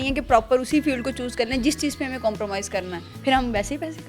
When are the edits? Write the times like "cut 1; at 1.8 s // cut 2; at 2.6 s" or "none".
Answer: cut 1; at 3.0 s